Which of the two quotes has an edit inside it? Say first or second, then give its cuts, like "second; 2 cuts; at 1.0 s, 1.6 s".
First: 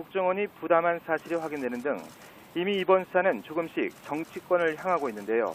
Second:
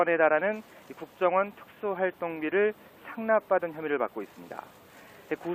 first; 1 cut; at 2.5 s